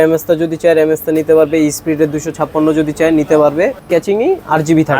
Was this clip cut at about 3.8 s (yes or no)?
yes